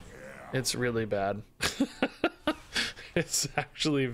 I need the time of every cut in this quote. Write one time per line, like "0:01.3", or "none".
none